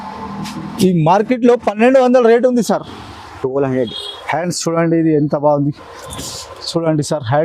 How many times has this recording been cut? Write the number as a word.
one